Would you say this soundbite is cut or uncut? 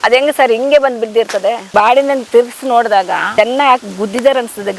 cut